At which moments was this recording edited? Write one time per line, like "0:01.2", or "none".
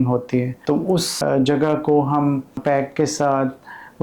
0:01.1
0:02.6

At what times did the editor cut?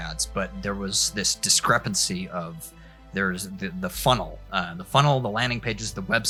none

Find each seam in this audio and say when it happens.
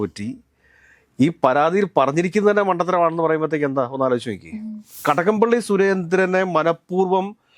0:05.0

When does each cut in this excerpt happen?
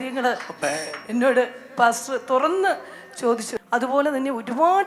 0:03.5

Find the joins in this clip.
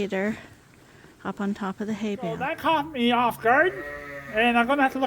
0:02.5

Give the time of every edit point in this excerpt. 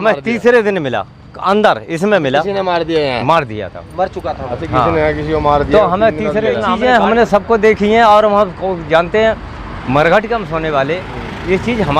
0:06.7

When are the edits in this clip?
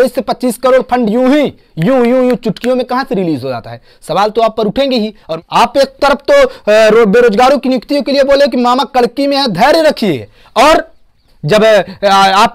0:05.2

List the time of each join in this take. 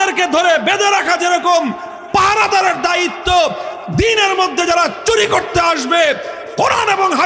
none

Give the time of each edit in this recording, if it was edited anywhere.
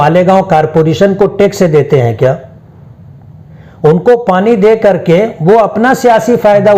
none

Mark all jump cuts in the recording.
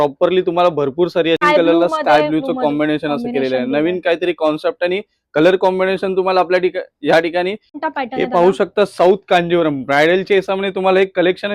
0:01.4
0:07.8

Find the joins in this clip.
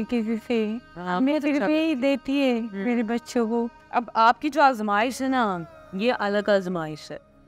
0:03.8

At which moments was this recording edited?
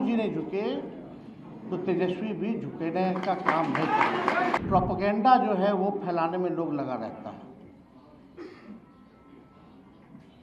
0:04.6

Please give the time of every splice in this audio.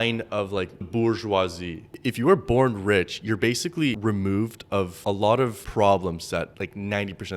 0:00.9
0:01.8
0:04.0
0:05.4
0:06.5

